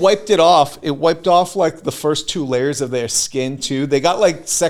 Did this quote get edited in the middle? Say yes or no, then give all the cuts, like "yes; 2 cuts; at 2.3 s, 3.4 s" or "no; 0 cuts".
no; 0 cuts